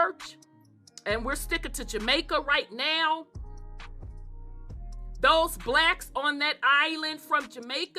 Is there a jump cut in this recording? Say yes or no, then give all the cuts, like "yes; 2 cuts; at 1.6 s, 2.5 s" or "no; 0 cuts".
no; 0 cuts